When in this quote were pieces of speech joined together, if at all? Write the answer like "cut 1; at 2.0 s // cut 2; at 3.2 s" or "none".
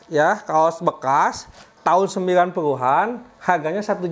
none